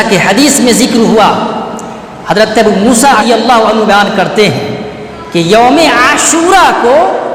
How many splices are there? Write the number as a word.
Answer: one